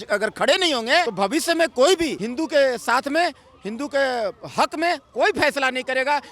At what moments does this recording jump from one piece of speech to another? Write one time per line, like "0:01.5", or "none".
0:01.1
0:02.2